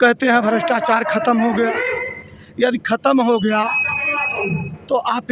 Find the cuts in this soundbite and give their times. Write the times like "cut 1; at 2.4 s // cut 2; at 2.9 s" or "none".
none